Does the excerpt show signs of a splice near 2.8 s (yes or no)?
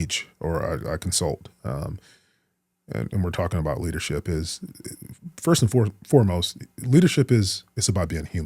no